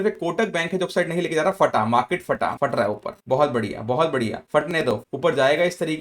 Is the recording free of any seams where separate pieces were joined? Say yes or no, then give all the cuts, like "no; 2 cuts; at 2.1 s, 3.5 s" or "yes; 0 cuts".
no; 2 cuts; at 2.5 s, 5.0 s